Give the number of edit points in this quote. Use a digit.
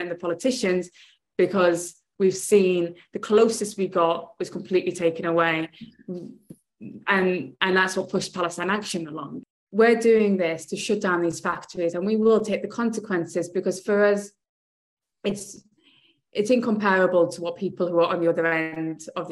1